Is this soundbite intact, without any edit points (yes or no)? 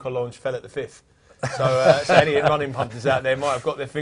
yes